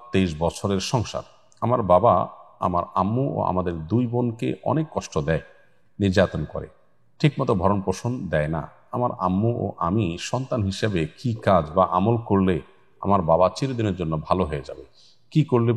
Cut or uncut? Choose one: uncut